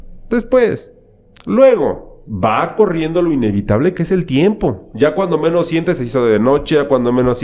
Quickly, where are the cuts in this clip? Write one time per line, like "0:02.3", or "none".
0:02.2
0:04.8